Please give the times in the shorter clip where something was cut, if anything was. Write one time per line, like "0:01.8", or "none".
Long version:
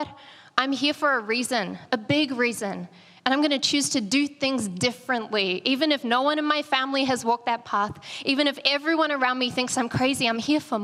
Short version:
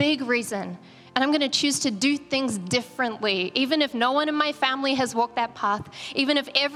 none

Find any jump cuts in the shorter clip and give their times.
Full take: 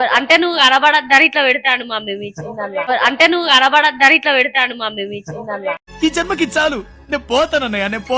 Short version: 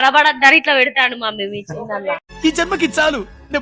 0:02.2

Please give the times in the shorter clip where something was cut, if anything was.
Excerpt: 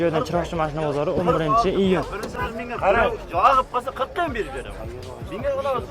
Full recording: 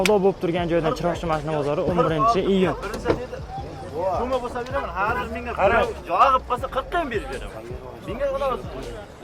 0:02.3

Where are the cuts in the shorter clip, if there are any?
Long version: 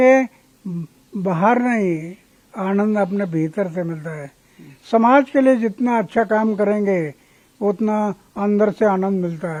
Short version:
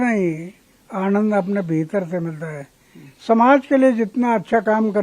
none

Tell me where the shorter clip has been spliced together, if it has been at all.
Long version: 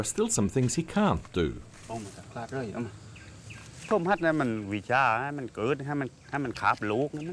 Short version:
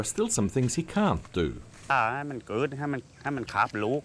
0:01.9

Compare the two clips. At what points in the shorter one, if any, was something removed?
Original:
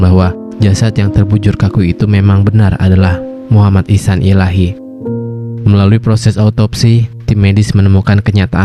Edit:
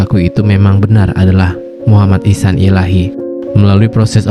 0:03.3

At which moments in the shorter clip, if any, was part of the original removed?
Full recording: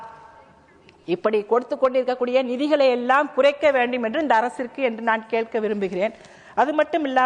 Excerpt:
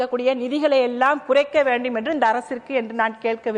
none

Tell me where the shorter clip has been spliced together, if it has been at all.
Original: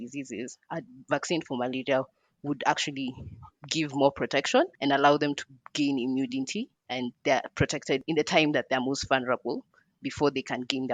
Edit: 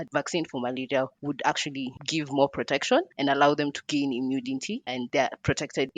0:01.2
0:02.0
0:03.8
0:05.0

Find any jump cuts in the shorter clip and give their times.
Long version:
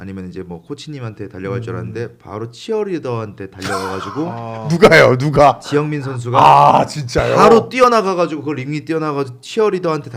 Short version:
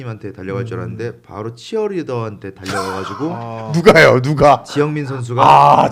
none

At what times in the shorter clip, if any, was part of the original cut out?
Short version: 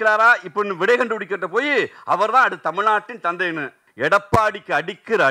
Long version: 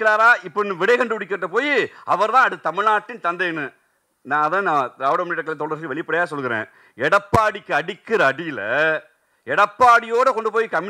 0:03.8

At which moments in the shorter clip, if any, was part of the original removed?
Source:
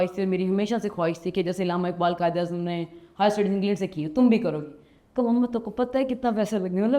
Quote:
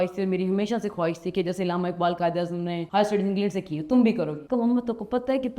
0:02.8
0:04.4

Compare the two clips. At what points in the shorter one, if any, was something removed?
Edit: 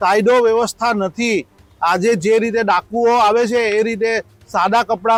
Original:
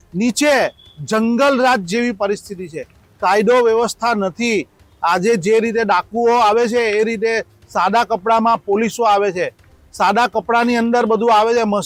none

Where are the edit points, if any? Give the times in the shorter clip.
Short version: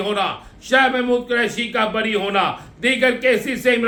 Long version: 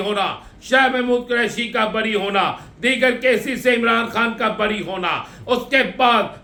none

